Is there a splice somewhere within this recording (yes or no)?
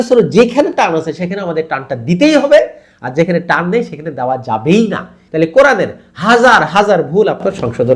yes